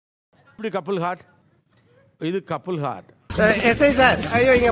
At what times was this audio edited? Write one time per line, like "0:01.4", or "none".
none